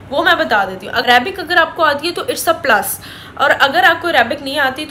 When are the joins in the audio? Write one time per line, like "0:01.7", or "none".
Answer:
0:01.0